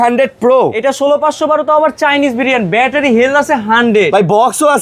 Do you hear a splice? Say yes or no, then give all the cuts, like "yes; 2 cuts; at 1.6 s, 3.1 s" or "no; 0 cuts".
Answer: no; 0 cuts